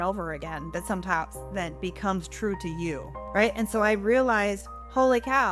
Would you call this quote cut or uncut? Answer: cut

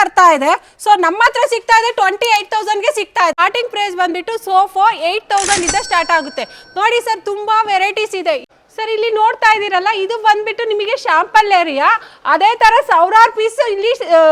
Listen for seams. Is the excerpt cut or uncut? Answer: cut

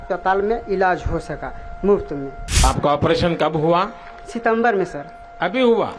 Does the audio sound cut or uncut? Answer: cut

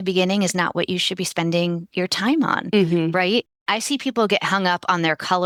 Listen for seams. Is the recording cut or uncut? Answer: uncut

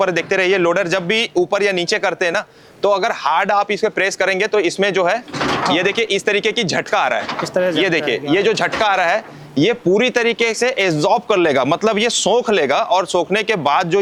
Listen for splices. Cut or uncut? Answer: uncut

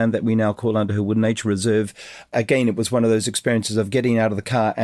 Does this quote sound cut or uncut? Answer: cut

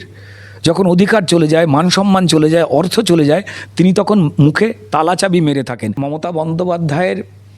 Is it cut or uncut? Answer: cut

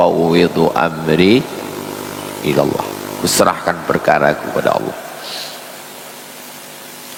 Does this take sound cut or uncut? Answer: uncut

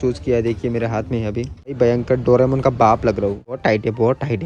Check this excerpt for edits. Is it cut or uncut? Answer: cut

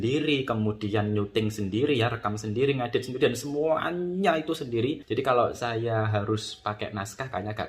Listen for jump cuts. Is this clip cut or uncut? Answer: cut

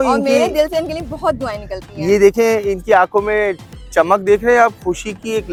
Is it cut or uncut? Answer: uncut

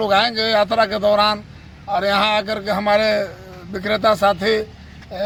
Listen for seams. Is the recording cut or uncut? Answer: uncut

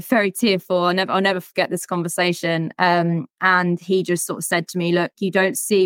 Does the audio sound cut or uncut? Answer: uncut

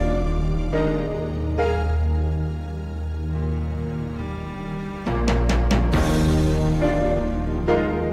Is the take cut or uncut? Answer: uncut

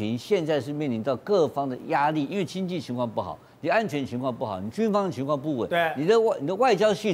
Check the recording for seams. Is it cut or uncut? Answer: uncut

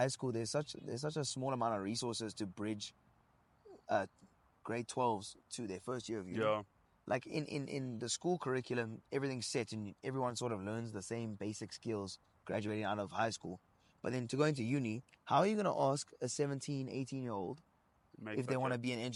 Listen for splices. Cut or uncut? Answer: uncut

